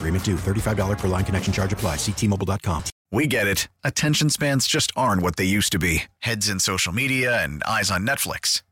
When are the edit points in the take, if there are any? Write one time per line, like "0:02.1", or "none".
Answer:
0:02.9

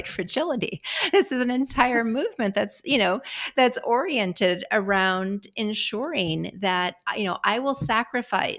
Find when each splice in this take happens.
none

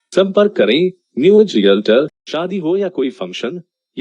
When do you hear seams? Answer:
0:02.2

